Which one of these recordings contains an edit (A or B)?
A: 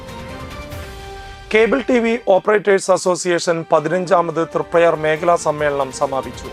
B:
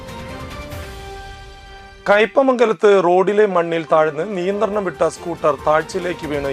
B